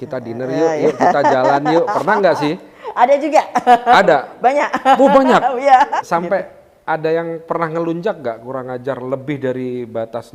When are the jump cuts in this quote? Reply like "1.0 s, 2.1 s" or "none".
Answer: 6.0 s